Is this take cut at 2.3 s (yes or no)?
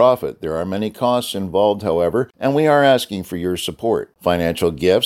yes